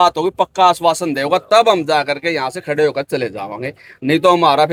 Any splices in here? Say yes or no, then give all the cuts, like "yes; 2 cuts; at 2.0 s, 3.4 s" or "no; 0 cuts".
no; 0 cuts